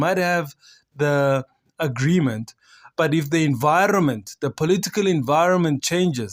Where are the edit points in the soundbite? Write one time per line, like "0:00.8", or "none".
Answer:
none